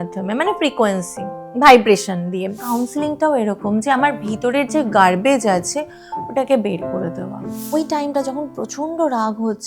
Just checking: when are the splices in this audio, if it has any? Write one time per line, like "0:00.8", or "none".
0:02.6
0:07.7